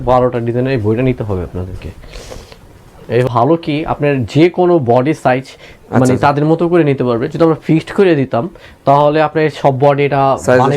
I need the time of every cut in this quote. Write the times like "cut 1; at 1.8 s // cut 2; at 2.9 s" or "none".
cut 1; at 3.3 s

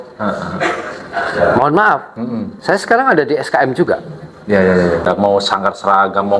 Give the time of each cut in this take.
cut 1; at 5.1 s

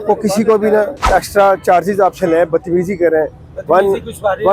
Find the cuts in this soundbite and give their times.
cut 1; at 1.0 s

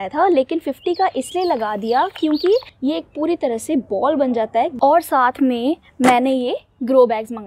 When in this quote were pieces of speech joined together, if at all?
cut 1; at 2.7 s // cut 2; at 4.7 s

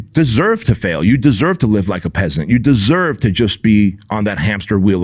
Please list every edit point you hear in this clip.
none

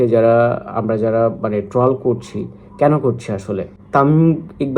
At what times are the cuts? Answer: none

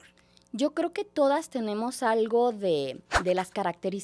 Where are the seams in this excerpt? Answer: cut 1; at 3.1 s

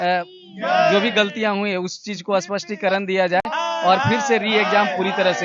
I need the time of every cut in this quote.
none

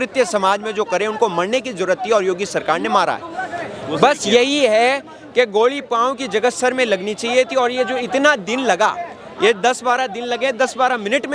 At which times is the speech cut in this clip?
none

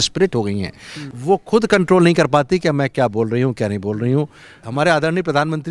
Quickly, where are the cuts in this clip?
cut 1; at 1.0 s // cut 2; at 4.6 s

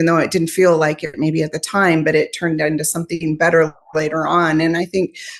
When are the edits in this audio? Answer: none

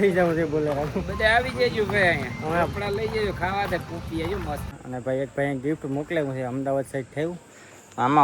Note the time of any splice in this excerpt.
cut 1; at 4.8 s

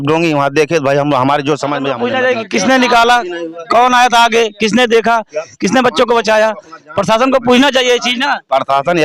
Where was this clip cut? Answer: cut 1; at 2.0 s

